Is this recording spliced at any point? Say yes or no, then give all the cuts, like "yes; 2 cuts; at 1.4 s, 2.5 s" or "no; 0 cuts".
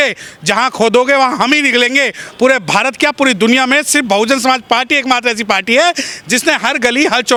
no; 0 cuts